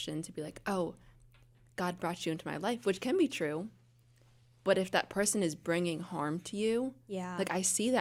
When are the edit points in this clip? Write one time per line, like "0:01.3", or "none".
none